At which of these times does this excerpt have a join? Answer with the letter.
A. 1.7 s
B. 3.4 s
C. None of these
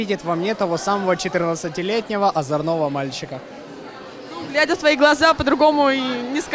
C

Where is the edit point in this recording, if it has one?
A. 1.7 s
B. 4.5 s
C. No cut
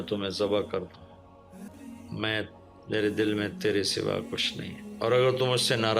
A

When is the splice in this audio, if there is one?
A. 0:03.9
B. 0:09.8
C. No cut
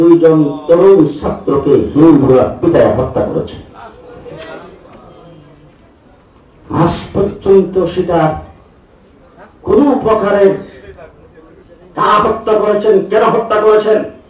C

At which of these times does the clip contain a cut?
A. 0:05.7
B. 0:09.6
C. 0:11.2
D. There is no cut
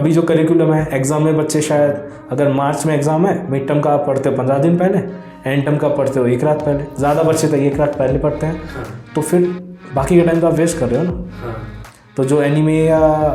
D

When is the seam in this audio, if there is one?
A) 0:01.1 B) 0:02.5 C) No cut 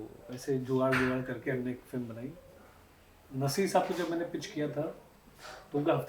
C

